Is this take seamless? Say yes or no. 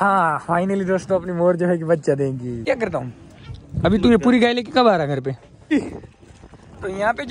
no